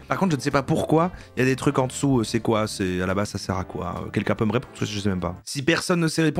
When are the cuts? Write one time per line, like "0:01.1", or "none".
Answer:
0:05.5